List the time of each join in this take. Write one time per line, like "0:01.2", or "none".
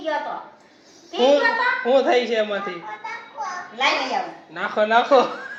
none